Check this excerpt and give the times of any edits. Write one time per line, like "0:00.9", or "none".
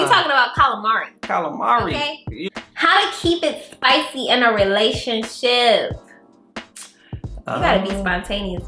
0:02.3